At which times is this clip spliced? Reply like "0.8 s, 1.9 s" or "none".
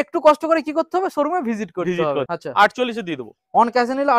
2.3 s